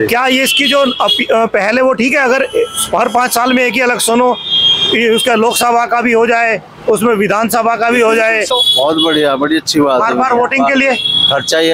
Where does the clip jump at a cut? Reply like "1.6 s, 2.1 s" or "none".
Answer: none